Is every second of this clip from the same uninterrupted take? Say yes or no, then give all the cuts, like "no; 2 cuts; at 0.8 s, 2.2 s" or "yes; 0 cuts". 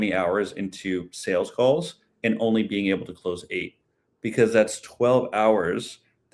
yes; 0 cuts